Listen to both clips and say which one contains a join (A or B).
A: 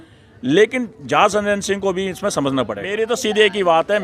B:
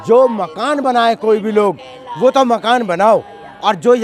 A